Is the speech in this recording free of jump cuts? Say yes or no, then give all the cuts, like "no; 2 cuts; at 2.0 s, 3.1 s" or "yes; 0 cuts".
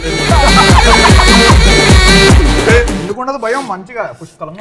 yes; 0 cuts